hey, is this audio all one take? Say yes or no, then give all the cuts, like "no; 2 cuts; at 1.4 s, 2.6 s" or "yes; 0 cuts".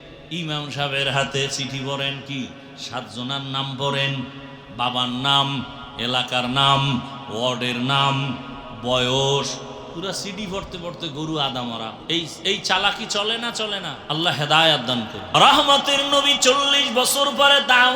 no; 2 cuts; at 13.9 s, 15.3 s